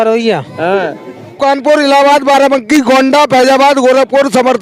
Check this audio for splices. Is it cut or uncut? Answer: cut